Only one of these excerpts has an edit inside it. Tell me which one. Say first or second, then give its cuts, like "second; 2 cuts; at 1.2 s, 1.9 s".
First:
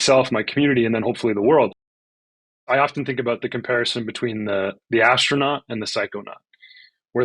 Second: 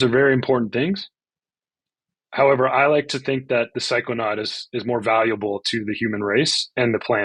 first; 1 cut; at 2.3 s